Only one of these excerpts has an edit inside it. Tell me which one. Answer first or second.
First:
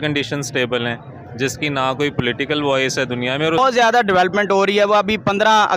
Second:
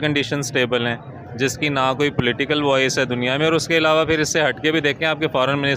first